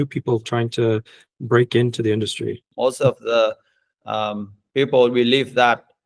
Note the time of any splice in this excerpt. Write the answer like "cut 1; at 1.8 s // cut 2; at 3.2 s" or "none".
cut 1; at 2.6 s